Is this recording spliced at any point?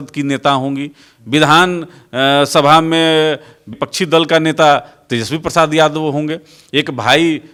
no; 0 cuts

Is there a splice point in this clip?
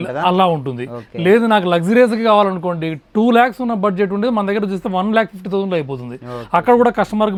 no; 0 cuts

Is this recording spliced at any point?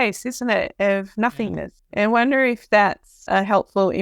yes; 2 cuts; at 1.8 s, 3.2 s

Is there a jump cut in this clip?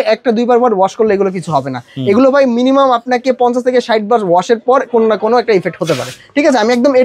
no; 0 cuts

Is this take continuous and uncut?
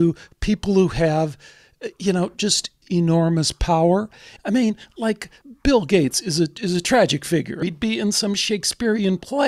no; 4 cuts; at 2.8 s, 4.3 s, 5.4 s, 7.6 s

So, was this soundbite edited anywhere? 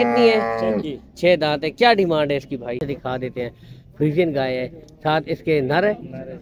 yes; 1 cut; at 2.8 s

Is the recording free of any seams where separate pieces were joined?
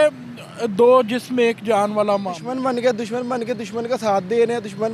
no; 1 cut; at 2.4 s

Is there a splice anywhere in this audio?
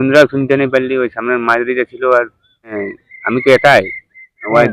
yes; 1 cut; at 2.9 s

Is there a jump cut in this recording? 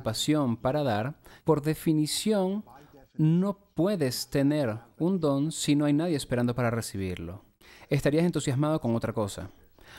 yes; 1 cut; at 1.3 s

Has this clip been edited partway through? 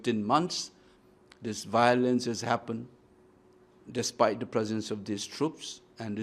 no; 0 cuts

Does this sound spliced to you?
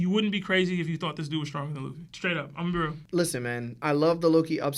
yes; 1 cut; at 3.0 s

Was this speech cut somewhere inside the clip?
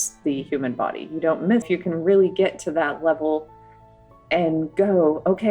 yes; 1 cut; at 1.6 s

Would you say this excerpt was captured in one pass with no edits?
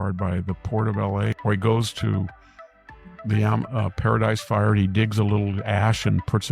no; 1 cut; at 1.3 s

